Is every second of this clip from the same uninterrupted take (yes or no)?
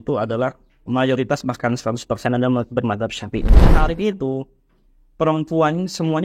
no